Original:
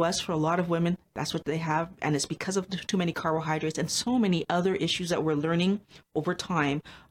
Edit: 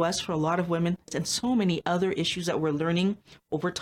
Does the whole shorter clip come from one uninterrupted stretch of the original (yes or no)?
no